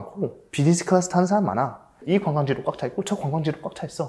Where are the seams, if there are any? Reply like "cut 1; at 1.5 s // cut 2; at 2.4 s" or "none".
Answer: cut 1; at 1.9 s